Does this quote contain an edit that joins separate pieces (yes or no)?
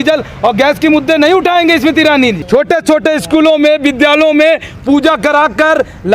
yes